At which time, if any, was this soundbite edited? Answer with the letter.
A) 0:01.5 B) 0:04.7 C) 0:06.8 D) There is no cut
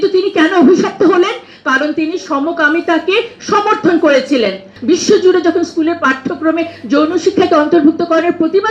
B